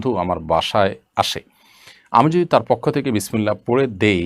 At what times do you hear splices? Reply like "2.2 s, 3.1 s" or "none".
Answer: none